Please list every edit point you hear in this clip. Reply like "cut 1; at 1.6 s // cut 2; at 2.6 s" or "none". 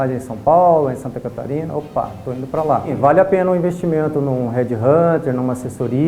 cut 1; at 2.9 s